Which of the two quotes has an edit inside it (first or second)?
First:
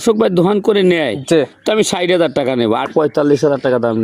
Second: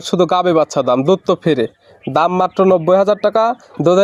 first